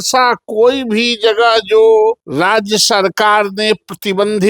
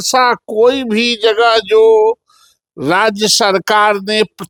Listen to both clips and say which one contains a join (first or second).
first